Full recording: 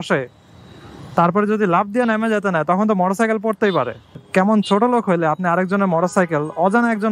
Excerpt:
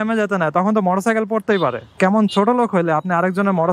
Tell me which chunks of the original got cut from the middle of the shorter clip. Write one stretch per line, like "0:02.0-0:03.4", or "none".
0:04.0-0:04.2